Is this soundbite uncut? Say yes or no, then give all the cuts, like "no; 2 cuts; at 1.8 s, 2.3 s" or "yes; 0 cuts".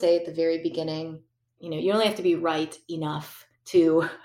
no; 1 cut; at 1.6 s